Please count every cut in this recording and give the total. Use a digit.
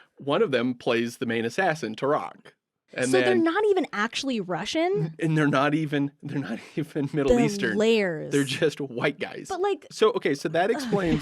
2